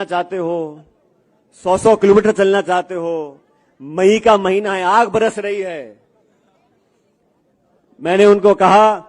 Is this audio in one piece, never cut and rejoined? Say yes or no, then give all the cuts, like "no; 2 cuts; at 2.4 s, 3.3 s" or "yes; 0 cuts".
yes; 0 cuts